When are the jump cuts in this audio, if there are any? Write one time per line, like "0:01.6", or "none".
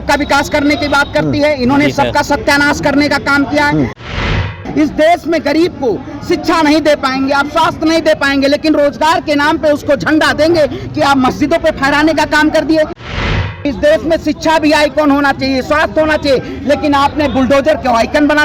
0:04.3
0:13.1